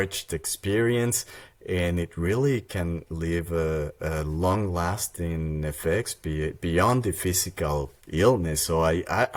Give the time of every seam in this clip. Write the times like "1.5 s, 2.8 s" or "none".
none